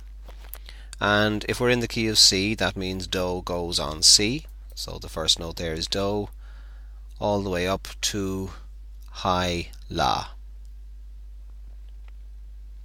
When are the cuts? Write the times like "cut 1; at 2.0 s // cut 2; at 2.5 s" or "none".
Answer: cut 1; at 7.5 s